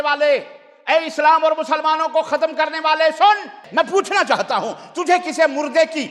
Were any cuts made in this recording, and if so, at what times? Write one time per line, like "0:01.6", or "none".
0:03.6